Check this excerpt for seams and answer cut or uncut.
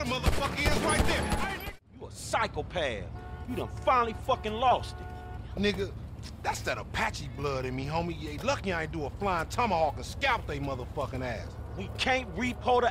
cut